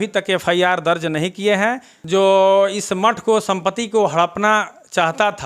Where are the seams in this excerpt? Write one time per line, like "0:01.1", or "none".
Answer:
0:01.9